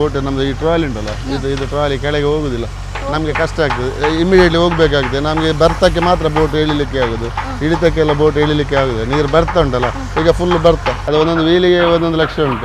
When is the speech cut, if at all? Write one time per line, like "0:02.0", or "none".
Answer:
0:11.0